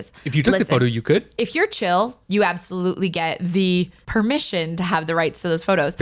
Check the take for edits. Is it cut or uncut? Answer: cut